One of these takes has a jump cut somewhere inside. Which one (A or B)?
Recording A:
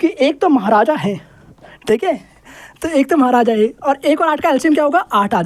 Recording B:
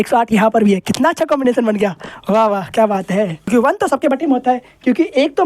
B